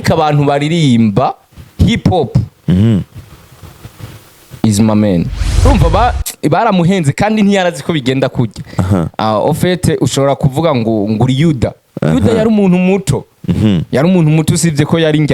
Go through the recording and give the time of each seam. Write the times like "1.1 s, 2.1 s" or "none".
5.7 s